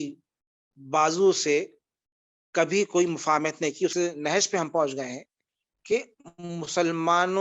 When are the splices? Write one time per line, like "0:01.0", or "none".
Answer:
0:03.9